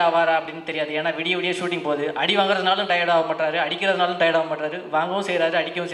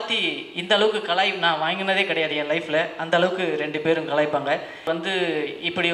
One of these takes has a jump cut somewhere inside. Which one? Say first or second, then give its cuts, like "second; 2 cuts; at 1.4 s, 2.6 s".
second; 1 cut; at 4.9 s